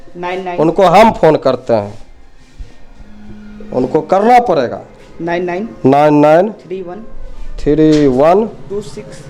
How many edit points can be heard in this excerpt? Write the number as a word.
zero